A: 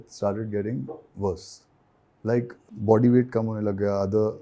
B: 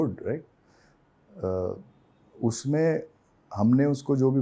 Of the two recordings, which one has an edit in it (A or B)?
A